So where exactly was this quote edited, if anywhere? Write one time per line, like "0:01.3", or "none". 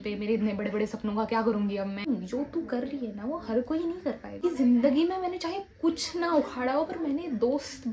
0:02.1
0:04.4